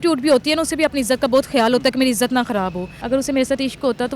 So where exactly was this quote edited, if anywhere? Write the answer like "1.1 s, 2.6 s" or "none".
2.9 s